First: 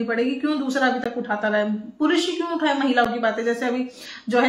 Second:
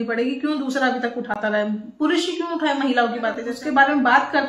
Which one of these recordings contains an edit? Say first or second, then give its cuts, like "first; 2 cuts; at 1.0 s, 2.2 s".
second; 1 cut; at 3.5 s